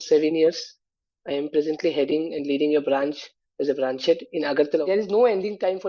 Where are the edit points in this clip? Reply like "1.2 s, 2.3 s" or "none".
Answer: 4.8 s